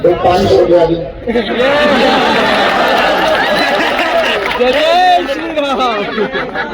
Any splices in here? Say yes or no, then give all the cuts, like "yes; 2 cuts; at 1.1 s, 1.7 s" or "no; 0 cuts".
no; 0 cuts